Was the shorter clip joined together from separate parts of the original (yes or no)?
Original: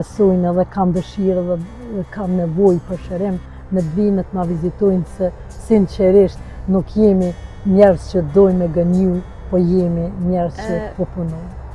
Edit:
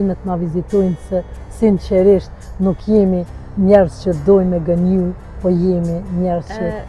no